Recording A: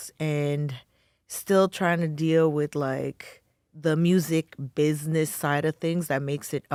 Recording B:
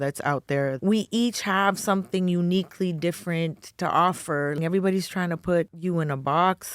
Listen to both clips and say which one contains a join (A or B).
B